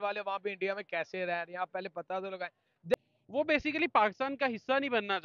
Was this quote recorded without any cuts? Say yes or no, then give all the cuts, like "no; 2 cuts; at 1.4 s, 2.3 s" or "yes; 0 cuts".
no; 1 cut; at 2.9 s